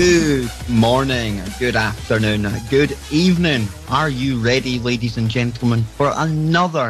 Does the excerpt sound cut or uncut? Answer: uncut